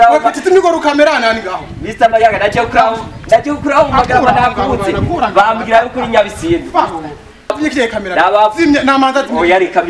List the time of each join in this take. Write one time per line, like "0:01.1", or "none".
0:07.6